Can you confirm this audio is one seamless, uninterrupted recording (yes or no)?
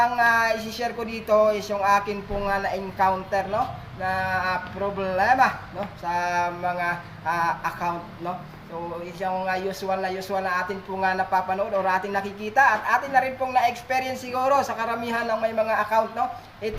no